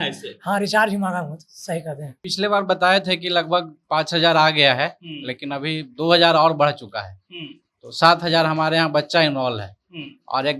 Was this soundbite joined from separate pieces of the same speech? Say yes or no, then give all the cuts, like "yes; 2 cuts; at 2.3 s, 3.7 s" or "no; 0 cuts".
yes; 1 cut; at 2.2 s